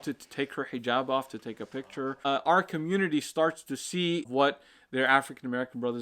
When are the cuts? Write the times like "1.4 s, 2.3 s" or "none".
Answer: 2.1 s, 4.3 s